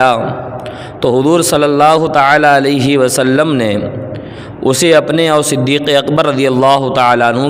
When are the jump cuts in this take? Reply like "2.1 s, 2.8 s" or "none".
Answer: none